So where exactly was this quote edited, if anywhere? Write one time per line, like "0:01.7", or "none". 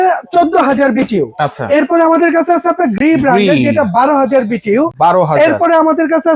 none